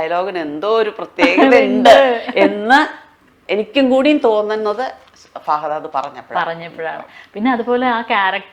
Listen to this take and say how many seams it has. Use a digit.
0